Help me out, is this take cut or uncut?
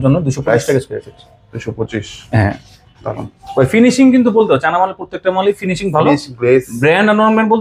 uncut